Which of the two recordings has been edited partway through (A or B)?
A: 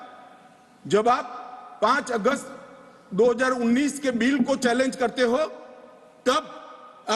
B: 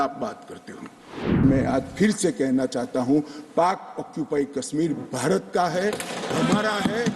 B